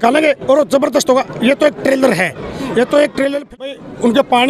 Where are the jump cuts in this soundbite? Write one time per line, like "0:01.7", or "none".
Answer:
0:03.5